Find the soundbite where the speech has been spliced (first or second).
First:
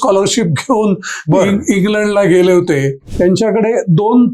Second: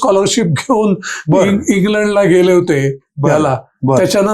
first